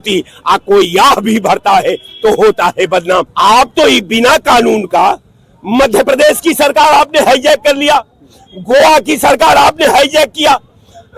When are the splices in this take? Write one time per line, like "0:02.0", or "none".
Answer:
0:03.3